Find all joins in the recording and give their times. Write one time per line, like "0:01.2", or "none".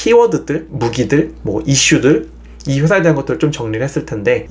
none

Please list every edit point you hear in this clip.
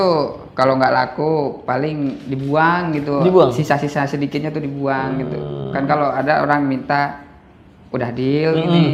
none

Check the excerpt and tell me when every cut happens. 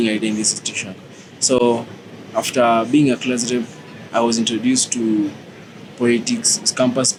none

